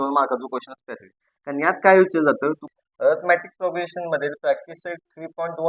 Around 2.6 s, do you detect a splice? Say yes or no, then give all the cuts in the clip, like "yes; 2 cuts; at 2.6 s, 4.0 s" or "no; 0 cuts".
yes; 1 cut; at 2.6 s